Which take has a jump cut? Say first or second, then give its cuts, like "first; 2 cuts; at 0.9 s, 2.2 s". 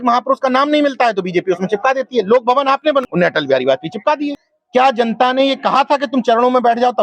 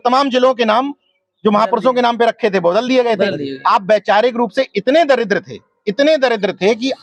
first; 2 cuts; at 3.0 s, 4.4 s